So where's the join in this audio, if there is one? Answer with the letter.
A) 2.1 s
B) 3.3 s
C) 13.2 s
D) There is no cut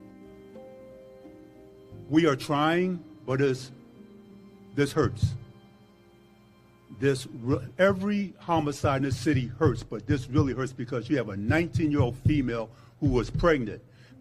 A